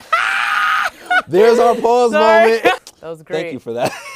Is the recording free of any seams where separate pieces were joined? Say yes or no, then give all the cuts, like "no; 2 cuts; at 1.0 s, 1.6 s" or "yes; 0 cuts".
no; 1 cut; at 2.8 s